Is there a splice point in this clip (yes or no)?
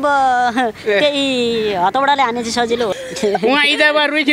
yes